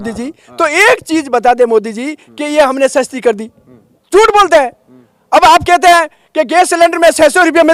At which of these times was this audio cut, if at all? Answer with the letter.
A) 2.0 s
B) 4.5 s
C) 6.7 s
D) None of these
D